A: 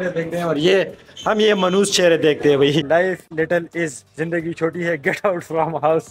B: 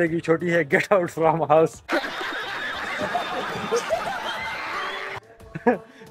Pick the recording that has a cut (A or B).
A